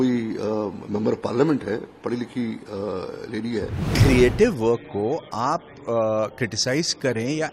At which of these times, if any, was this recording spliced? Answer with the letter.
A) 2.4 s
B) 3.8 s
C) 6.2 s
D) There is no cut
B